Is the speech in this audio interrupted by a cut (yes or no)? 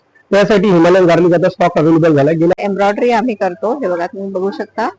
yes